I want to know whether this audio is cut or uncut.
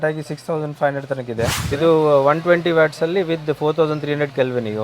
cut